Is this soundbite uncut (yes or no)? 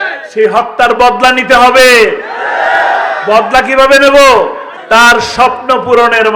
no